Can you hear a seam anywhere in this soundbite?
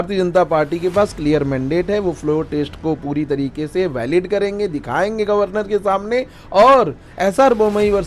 no; 0 cuts

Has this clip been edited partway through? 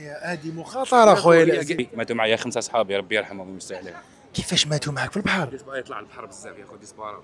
yes; 1 cut; at 1.8 s

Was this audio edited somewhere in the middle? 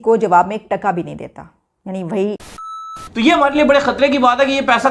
yes; 1 cut; at 2.9 s

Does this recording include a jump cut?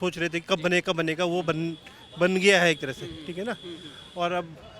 no; 0 cuts

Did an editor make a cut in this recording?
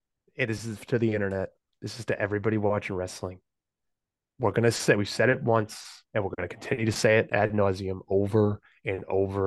no; 0 cuts

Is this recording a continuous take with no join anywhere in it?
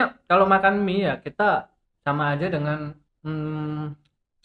no; 2 cuts; at 1.8 s, 3.1 s

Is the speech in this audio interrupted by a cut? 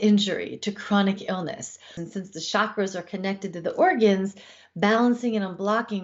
yes; 1 cut; at 2.0 s

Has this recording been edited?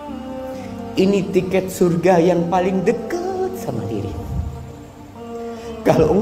yes; 1 cut; at 0.9 s

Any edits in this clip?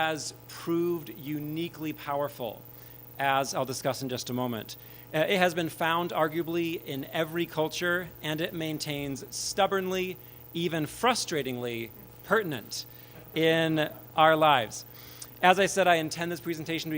yes; 1 cut; at 7.3 s

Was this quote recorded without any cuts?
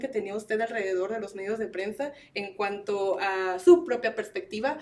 yes; 0 cuts

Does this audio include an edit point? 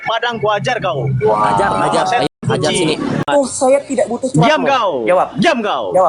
yes; 1 cut; at 3.2 s

